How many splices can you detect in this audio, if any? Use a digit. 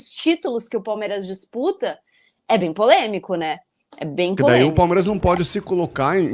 1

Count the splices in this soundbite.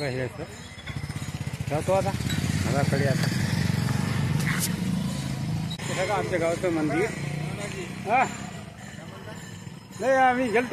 1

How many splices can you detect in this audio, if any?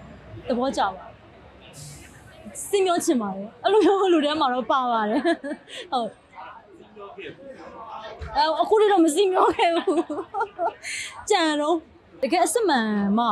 1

